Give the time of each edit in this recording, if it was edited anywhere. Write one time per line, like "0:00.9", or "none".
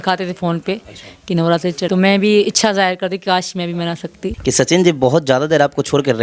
0:01.9
0:04.3